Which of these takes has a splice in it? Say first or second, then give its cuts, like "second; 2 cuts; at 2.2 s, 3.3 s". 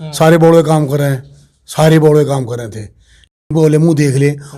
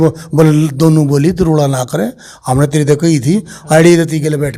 first; 1 cut; at 3.4 s